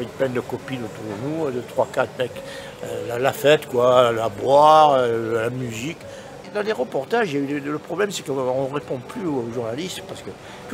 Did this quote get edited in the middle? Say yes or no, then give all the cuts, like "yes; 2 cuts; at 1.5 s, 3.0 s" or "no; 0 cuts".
yes; 1 cut; at 6.5 s